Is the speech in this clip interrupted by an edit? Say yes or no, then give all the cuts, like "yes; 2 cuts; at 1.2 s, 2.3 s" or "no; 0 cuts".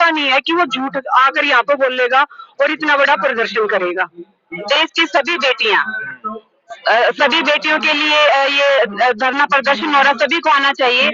yes; 1 cut; at 4.6 s